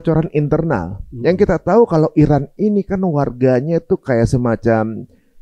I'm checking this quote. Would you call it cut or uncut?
uncut